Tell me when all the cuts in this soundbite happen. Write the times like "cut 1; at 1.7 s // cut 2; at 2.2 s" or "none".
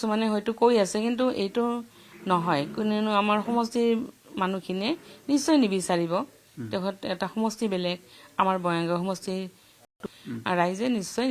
none